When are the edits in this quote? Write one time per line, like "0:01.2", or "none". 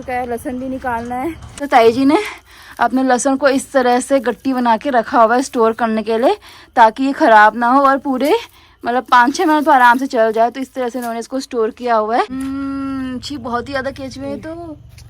0:01.5
0:12.3

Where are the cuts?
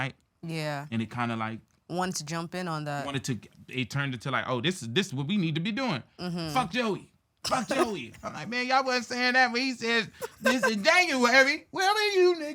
none

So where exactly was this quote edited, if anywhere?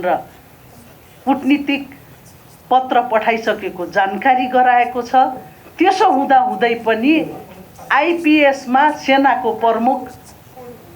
none

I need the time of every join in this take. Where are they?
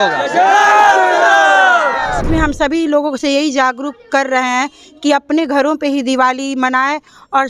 0:02.2

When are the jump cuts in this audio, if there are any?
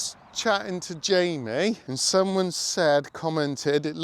0:01.9

